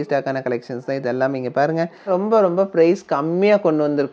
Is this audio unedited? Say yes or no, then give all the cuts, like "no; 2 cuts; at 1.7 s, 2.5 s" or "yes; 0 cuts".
no; 1 cut; at 2.1 s